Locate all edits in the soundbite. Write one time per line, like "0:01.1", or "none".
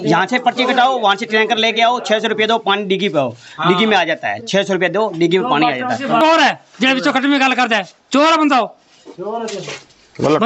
0:06.2